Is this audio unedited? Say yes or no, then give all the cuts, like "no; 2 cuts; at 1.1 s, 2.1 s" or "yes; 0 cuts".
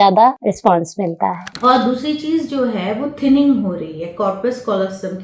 no; 1 cut; at 1.5 s